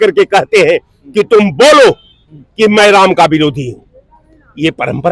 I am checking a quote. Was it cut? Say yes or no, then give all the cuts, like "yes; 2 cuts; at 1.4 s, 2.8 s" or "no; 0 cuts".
no; 0 cuts